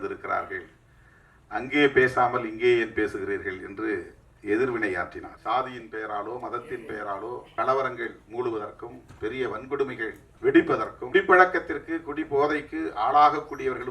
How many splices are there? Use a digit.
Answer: 4